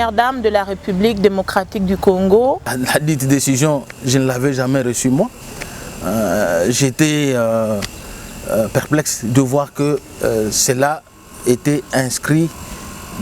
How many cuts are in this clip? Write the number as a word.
one